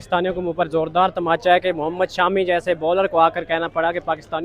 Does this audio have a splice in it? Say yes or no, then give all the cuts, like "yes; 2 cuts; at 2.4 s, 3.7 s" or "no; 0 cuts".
no; 0 cuts